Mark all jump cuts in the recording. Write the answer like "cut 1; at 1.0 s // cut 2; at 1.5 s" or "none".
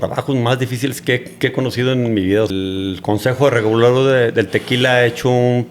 cut 1; at 2.5 s